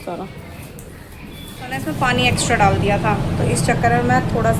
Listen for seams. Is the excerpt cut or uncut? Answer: cut